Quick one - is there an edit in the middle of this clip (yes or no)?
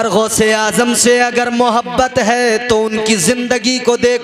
no